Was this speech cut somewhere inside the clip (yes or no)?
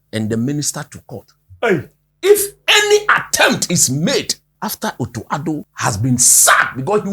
yes